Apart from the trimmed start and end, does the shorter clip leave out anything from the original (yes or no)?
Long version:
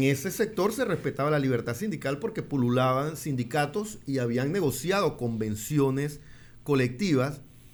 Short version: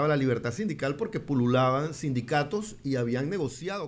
no